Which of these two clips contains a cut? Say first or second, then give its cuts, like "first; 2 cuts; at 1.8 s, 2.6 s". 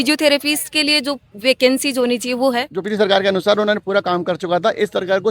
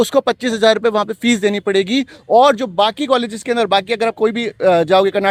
first; 1 cut; at 2.8 s